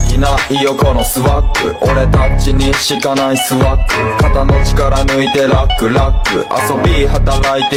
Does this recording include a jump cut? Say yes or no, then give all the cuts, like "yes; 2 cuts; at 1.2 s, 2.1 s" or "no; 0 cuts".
no; 0 cuts